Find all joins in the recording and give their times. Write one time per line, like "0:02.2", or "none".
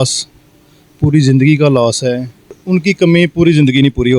0:02.6